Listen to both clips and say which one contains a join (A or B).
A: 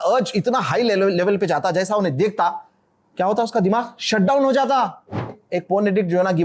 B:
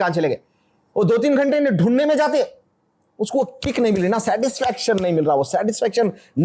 A